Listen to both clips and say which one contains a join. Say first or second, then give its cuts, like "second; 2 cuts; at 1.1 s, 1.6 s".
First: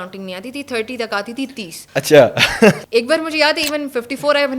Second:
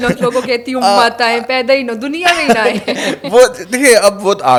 first; 2 cuts; at 1.7 s, 2.8 s